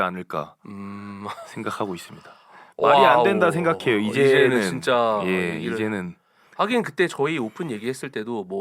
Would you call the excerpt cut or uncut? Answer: uncut